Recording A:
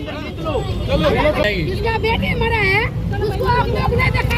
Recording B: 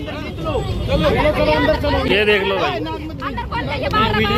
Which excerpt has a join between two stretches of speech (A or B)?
A